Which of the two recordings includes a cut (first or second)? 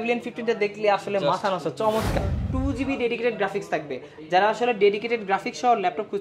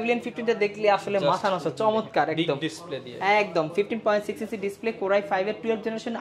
first